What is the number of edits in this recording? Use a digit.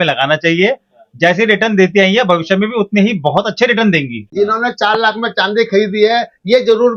1